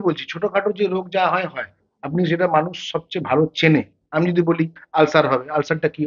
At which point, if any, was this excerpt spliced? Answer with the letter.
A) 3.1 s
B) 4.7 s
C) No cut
C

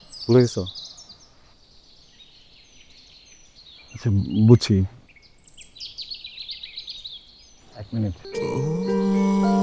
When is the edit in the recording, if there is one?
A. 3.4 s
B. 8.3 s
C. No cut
B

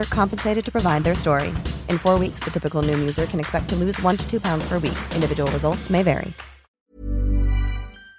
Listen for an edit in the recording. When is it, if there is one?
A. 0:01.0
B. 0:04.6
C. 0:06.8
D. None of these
C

